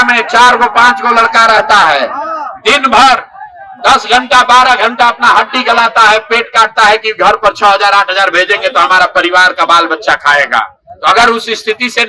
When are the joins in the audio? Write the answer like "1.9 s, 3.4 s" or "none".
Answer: none